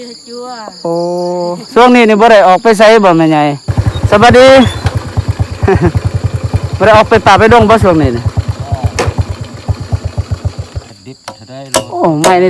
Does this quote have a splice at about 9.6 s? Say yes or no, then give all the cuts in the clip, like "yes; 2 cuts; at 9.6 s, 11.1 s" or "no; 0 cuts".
no; 2 cuts; at 3.6 s, 10.9 s